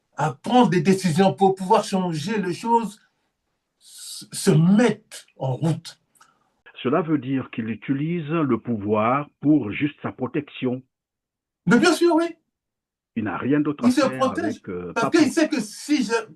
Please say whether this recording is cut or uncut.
cut